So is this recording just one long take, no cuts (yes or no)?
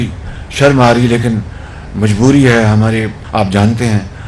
no